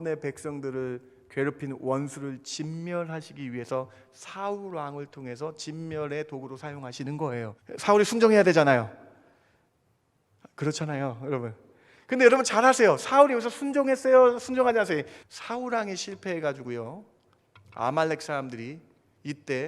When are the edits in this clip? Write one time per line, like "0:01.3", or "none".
0:07.6
0:15.2